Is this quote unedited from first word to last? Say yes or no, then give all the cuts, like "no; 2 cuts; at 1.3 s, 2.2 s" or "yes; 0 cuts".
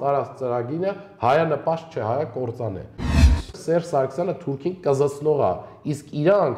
no; 1 cut; at 3.4 s